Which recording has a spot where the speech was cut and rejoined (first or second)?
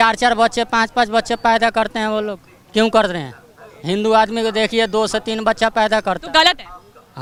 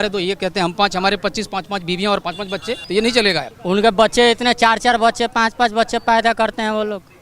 second